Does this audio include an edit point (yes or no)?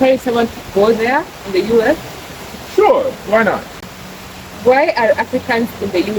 yes